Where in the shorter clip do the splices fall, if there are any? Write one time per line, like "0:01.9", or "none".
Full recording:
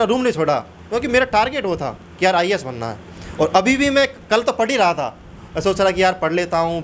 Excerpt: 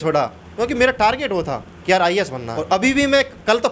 0:02.5